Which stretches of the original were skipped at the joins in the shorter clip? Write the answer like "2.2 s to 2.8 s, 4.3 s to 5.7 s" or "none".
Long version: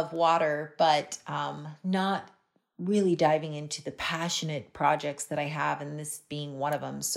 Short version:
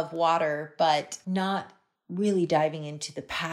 1.6 s to 2.3 s